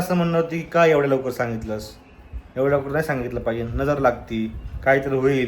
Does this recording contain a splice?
no; 0 cuts

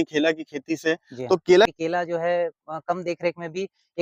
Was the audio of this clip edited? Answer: yes; 1 cut; at 1.7 s

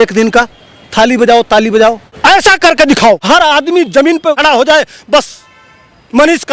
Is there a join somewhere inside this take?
yes; 3 cuts; at 2.1 s, 3.2 s, 4.4 s

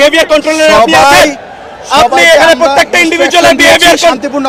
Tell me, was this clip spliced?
no; 0 cuts

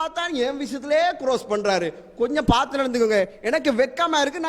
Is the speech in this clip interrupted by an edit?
no; 0 cuts

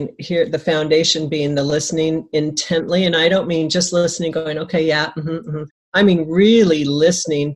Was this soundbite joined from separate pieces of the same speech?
no; 0 cuts

